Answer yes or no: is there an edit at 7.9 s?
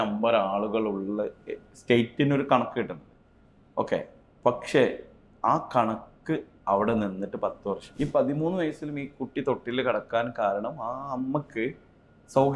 yes